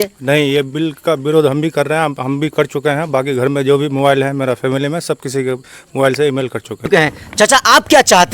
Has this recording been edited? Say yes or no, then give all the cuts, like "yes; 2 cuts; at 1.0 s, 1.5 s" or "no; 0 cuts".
yes; 1 cut; at 6.9 s